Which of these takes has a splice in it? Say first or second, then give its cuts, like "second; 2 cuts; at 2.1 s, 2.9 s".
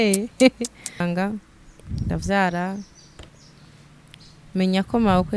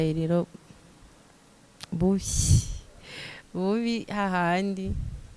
first; 1 cut; at 1.0 s